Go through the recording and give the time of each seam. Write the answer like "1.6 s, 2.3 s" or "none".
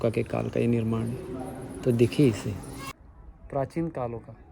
2.8 s